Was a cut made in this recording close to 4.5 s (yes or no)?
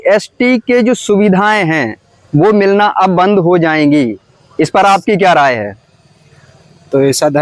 no